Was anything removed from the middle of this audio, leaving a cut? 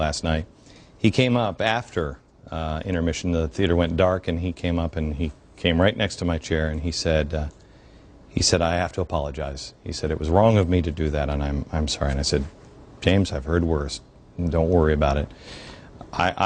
no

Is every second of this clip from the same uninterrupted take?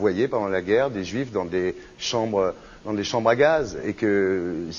yes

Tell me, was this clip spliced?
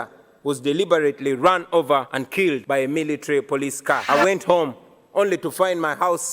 yes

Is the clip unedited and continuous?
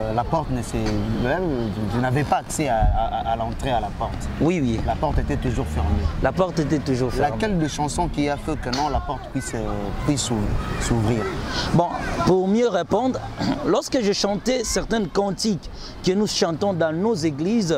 yes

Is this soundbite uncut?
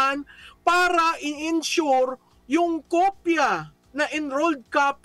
no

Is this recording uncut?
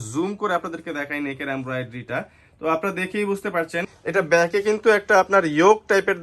no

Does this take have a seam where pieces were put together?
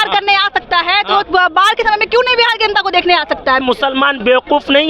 yes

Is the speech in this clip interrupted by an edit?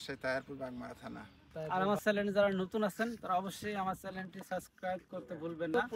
yes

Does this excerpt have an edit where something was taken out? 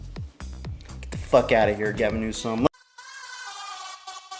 yes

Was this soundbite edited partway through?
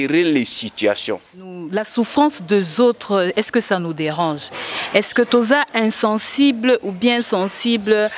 yes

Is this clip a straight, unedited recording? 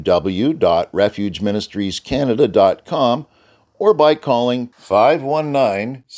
yes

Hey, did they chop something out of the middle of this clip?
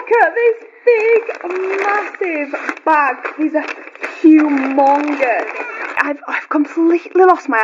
yes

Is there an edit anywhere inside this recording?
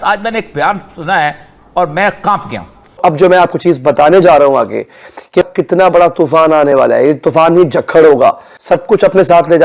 yes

